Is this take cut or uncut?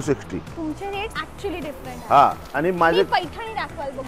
uncut